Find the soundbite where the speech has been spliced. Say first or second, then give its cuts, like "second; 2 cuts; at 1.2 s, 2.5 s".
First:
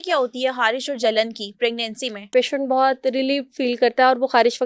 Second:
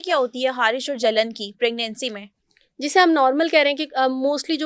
first; 1 cut; at 2.3 s